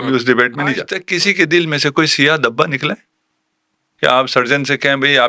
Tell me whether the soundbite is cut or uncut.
cut